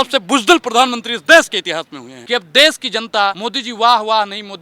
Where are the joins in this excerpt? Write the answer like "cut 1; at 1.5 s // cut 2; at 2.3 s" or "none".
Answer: cut 1; at 2.1 s // cut 2; at 3.5 s

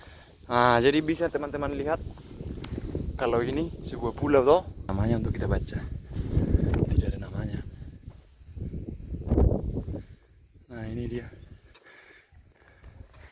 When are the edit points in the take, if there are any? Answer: cut 1; at 4.9 s

